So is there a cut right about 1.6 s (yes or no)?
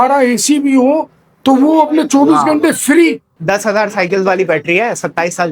no